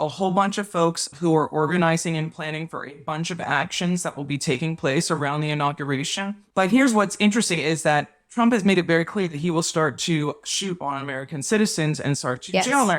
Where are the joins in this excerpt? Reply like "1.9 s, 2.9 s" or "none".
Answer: 1.1 s, 6.4 s